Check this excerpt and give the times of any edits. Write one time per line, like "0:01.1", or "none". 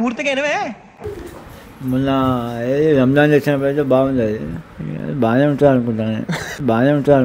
0:01.0